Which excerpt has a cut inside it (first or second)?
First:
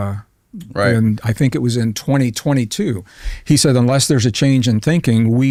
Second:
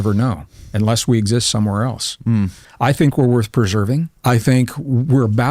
second